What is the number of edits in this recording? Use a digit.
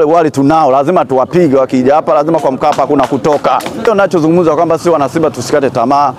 1